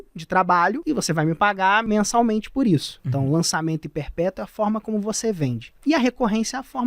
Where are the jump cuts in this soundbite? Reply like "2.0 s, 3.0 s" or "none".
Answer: 0.8 s, 1.8 s, 3.0 s, 5.7 s